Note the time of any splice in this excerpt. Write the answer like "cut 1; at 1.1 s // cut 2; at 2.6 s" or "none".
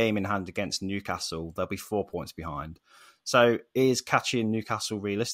none